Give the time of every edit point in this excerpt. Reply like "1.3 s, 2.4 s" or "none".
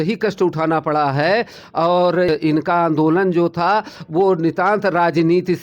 2.3 s